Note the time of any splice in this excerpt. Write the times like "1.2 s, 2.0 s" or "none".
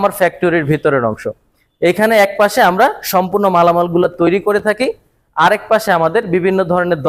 none

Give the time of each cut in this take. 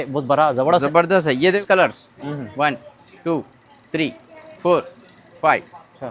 1.6 s

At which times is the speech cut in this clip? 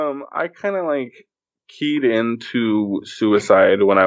none

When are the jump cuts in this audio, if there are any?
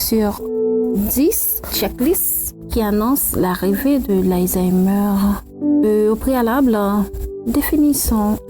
5.8 s

